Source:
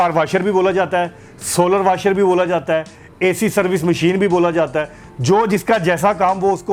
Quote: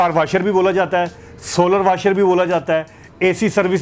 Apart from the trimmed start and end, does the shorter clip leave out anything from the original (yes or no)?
no